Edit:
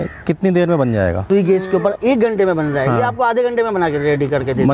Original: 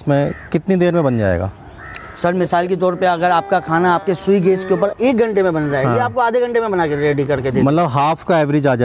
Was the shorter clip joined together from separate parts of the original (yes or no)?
yes